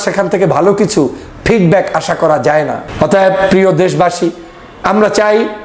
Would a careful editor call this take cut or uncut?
cut